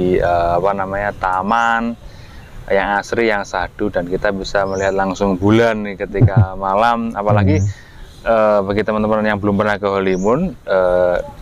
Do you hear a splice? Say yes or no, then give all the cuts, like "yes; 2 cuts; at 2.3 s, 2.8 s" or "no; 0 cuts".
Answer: no; 0 cuts